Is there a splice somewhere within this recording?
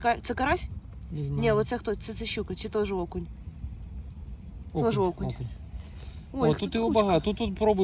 no; 0 cuts

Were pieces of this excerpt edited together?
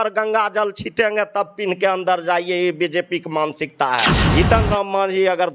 yes; 1 cut; at 4.2 s

